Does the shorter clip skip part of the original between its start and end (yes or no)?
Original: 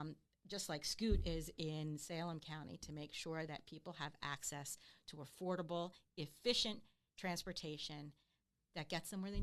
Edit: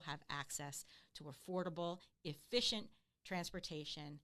no